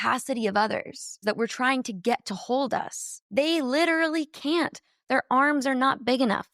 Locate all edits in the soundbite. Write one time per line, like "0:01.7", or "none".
0:01.2